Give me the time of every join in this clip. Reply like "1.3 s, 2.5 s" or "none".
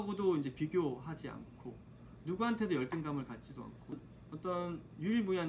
4.0 s